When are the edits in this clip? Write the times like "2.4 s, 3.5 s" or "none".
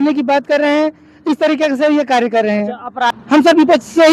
3.2 s